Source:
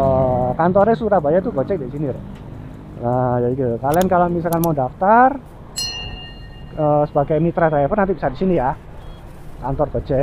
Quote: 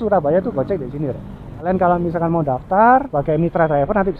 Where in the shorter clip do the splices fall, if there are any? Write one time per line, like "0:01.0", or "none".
0:01.6
0:03.1